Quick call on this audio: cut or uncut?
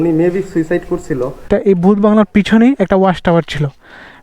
cut